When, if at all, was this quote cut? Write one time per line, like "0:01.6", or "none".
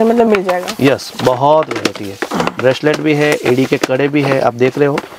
none

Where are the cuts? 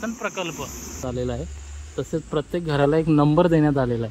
0:01.0

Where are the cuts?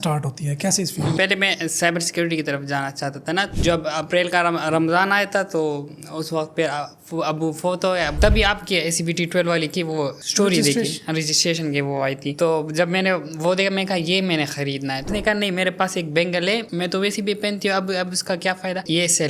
0:01.2
0:03.5
0:08.2
0:10.2
0:15.0

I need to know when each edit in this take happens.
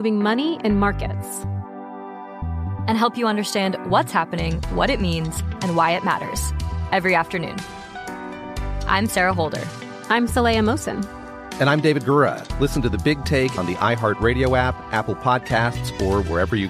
none

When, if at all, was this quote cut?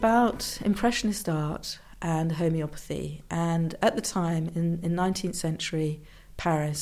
none

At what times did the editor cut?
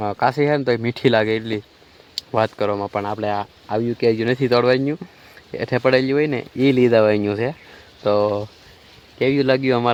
none

